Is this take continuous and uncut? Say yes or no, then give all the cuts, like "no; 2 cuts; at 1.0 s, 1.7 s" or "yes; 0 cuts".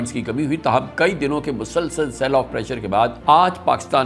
yes; 0 cuts